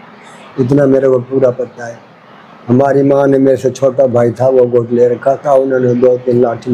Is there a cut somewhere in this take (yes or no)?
no